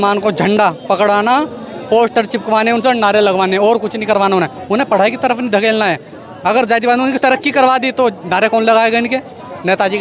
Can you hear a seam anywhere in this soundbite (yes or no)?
no